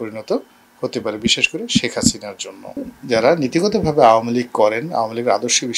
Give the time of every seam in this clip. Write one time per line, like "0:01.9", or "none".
0:02.9